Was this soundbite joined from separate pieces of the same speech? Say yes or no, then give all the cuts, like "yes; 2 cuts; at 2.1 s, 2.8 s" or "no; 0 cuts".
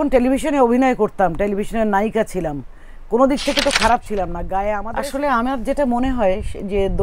yes; 1 cut; at 4.8 s